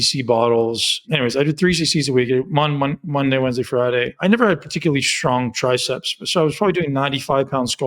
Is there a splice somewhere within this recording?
yes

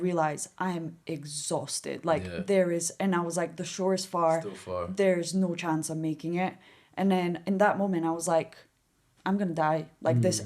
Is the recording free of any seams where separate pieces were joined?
yes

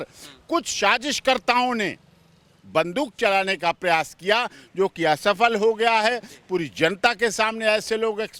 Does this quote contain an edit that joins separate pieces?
no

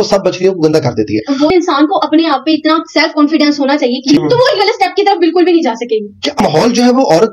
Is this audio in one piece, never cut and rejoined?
no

